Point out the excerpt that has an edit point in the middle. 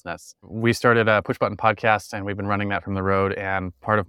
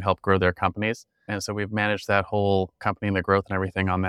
second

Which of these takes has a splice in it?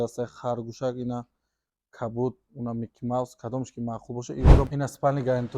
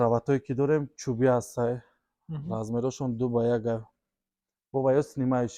first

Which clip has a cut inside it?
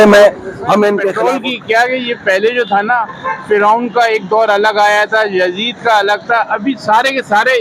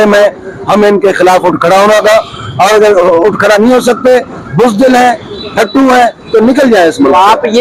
first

